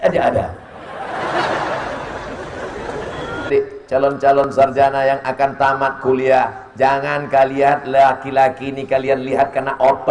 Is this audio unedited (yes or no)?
no